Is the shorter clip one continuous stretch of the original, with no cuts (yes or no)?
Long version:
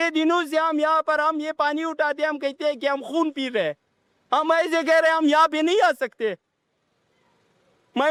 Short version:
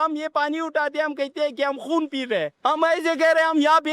no